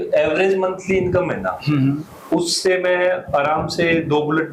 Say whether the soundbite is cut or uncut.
uncut